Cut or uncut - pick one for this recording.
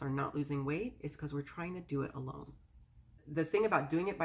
cut